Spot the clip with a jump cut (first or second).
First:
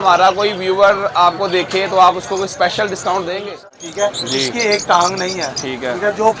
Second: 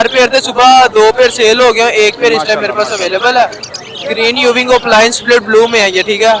first